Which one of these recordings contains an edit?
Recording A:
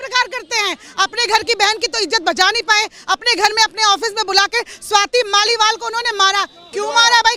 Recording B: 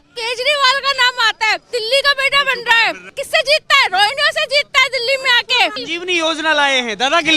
B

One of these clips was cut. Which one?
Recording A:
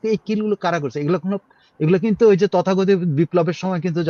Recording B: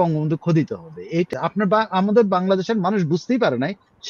B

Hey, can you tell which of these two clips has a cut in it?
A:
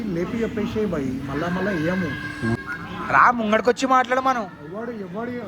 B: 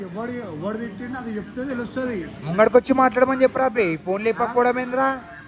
A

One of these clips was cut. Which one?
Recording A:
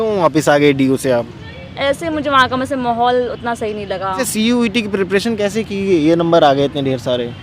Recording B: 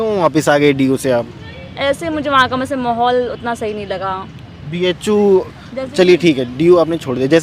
A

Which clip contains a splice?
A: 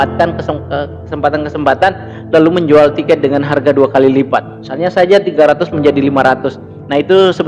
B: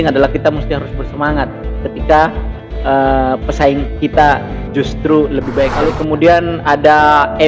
B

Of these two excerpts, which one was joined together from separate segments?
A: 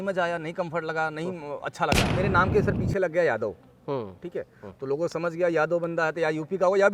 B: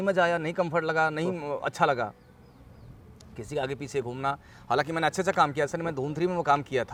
A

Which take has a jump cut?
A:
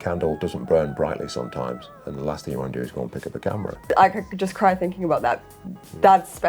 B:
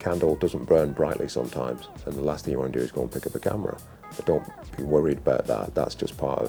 A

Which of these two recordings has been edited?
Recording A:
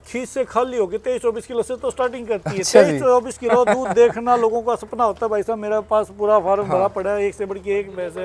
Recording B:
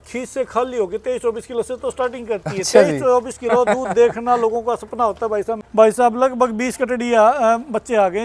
B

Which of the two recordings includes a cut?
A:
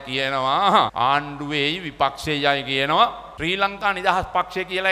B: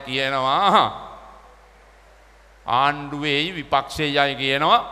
A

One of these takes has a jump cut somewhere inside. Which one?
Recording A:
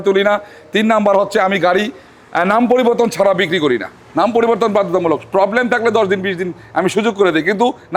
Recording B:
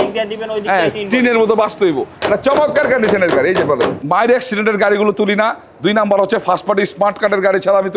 B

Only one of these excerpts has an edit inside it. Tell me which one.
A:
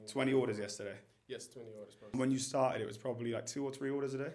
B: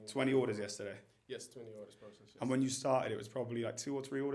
A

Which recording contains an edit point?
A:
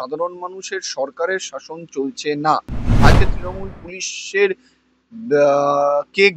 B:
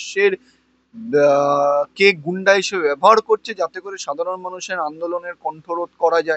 A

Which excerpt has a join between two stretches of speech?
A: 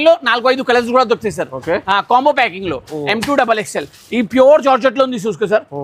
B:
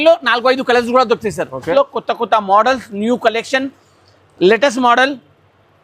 B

